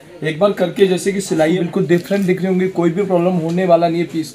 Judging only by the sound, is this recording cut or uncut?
cut